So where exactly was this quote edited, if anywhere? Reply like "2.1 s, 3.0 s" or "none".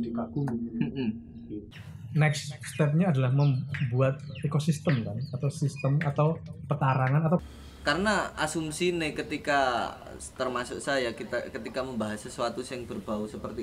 1.6 s, 7.4 s